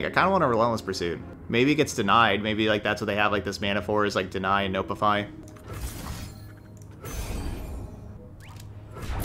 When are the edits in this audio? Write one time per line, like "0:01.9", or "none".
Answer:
0:01.3
0:05.4
0:08.2